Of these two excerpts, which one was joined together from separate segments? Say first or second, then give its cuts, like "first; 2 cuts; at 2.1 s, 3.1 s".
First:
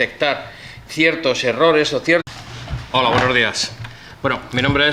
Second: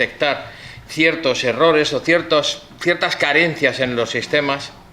second; 1 cut; at 2.2 s